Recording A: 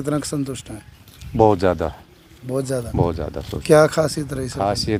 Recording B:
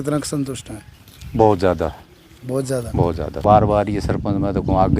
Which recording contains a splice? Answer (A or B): B